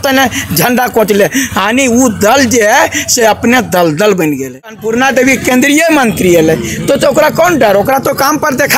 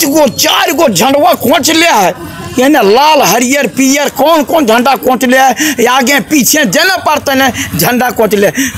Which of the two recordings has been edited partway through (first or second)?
first